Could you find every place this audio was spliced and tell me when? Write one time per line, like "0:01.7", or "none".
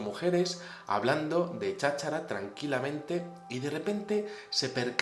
none